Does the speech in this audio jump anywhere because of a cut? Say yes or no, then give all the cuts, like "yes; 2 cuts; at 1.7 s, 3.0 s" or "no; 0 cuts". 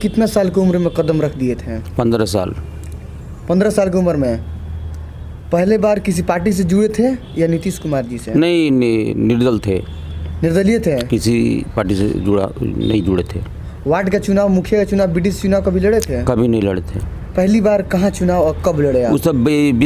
no; 0 cuts